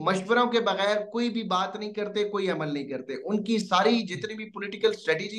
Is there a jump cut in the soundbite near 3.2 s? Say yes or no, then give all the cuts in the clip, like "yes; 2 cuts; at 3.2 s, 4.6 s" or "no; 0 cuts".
no; 0 cuts